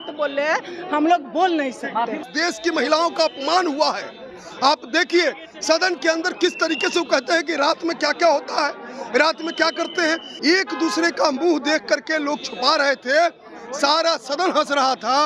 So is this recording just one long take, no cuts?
no; 2 cuts; at 2.2 s, 10.3 s

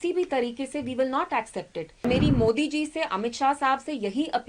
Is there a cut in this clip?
yes; 1 cut; at 2.0 s

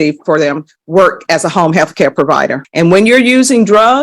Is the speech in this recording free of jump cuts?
no; 1 cut; at 2.6 s

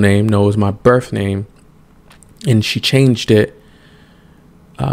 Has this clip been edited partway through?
no; 0 cuts

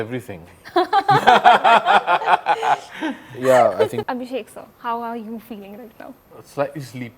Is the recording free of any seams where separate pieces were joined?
no; 1 cut; at 4.0 s

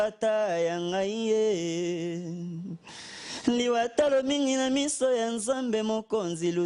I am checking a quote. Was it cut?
no; 0 cuts

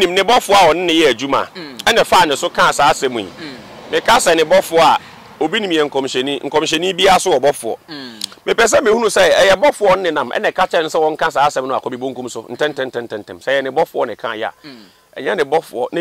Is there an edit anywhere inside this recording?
no; 0 cuts

